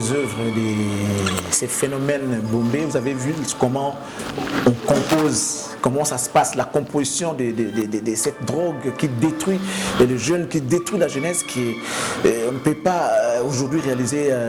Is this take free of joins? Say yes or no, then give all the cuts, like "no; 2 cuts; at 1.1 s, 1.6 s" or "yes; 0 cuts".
yes; 0 cuts